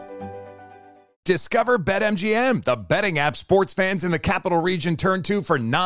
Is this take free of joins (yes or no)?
no